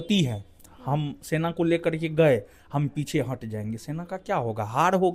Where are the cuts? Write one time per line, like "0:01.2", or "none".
none